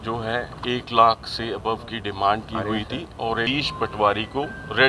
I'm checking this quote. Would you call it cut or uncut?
cut